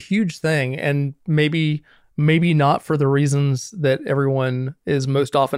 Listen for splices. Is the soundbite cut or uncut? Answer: uncut